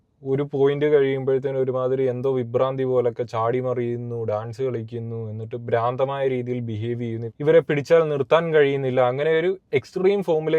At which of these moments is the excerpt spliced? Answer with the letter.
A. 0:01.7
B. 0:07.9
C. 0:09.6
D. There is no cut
D